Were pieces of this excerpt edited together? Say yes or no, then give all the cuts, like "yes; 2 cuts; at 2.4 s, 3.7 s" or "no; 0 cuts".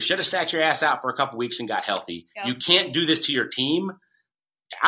no; 0 cuts